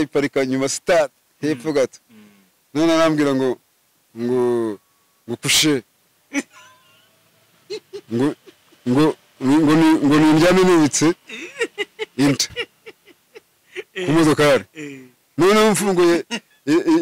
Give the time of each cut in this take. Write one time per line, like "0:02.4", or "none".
none